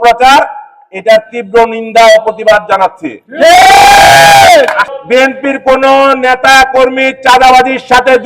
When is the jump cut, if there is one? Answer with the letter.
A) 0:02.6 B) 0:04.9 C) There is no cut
B